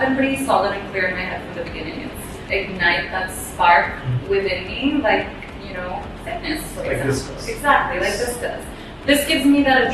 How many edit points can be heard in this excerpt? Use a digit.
1